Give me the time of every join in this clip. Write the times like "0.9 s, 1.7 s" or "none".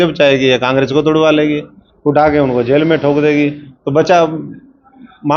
none